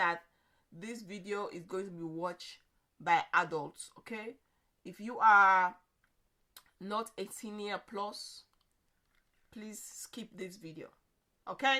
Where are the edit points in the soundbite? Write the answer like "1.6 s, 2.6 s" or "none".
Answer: none